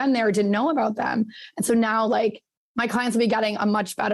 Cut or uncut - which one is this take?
uncut